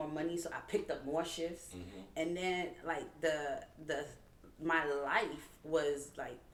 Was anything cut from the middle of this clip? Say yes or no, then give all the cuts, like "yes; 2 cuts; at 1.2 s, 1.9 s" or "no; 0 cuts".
no; 0 cuts